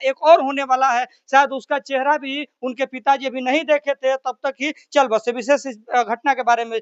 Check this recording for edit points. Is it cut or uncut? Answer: uncut